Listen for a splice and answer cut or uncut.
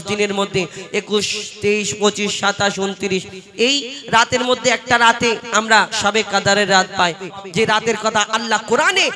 cut